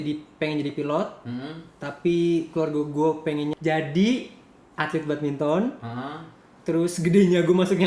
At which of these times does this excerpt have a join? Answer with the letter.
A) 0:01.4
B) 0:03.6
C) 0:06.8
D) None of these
B